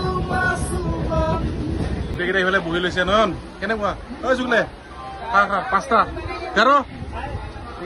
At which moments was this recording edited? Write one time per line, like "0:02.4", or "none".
0:02.1